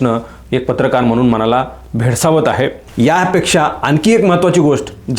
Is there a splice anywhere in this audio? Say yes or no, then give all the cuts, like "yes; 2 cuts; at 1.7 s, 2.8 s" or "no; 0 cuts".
yes; 1 cut; at 2.8 s